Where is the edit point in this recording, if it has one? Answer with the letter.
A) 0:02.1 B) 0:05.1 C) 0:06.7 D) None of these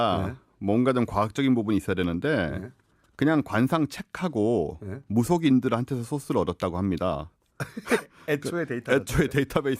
A